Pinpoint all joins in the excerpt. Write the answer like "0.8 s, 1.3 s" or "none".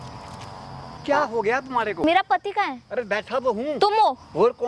1.0 s, 2.0 s, 3.8 s

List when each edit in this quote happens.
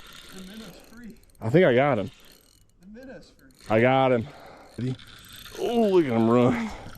4.8 s

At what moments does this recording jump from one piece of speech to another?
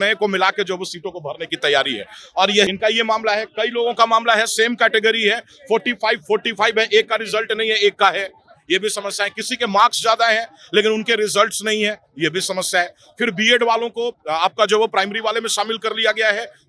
2.7 s

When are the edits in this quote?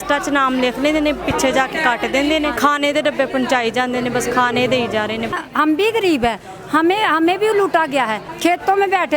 2.6 s, 5.3 s, 8.2 s

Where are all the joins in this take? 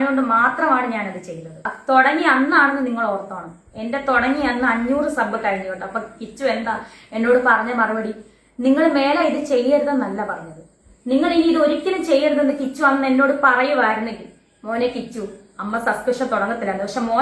1.7 s

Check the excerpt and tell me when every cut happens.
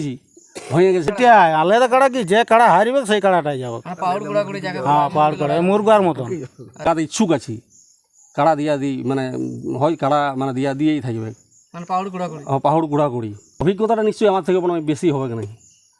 1.1 s, 6.8 s, 13.5 s

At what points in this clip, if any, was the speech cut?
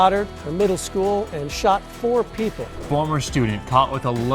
2.8 s

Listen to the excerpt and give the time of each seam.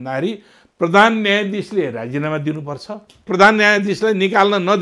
3.3 s

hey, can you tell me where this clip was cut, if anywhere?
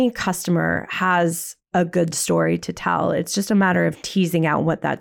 none

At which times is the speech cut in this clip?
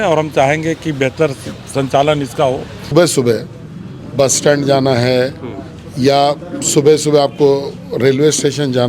2.9 s

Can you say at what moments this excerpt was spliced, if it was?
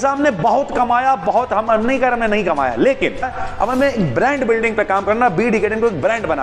3.4 s

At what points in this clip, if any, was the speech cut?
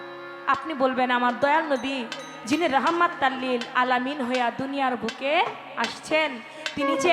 none

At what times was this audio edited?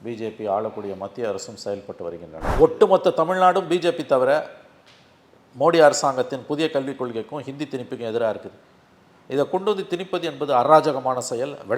2.5 s

